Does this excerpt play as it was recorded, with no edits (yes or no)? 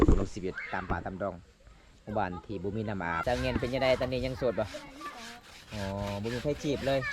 no